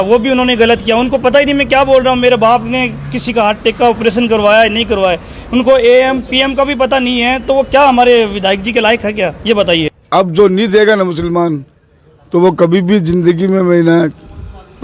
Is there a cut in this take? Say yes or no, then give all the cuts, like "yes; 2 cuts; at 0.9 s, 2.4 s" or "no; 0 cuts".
yes; 1 cut; at 10.0 s